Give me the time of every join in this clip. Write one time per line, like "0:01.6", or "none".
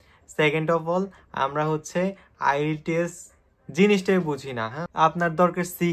0:04.8